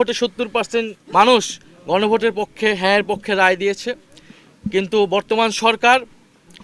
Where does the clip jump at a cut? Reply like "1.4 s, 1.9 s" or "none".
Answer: 1.0 s